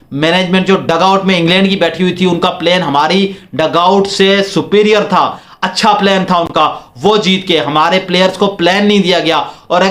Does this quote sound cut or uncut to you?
uncut